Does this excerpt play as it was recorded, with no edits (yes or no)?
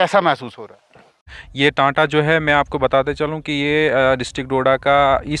no